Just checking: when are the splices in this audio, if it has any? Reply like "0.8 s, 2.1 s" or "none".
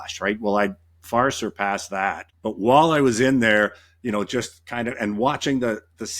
2.3 s